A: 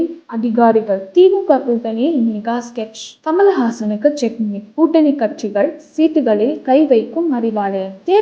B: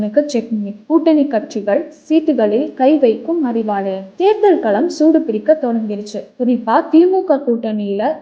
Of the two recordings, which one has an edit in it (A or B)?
A